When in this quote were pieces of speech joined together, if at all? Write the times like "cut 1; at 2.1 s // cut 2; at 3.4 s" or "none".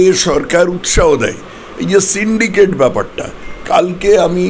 none